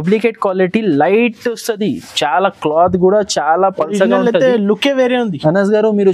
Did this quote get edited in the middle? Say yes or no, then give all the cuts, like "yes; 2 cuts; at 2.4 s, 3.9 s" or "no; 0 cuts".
no; 0 cuts